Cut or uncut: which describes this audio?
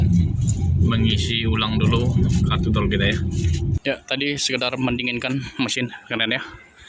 cut